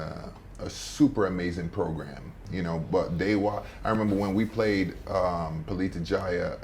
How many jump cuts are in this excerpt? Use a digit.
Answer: 1